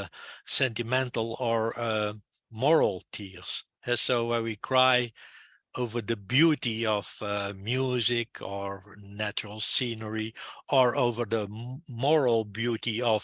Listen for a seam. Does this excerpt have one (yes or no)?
no